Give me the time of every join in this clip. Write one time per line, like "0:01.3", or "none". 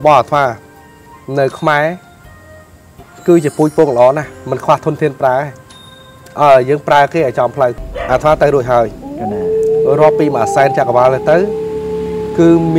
0:07.9
0:09.0